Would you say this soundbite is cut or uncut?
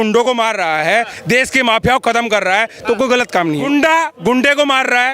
cut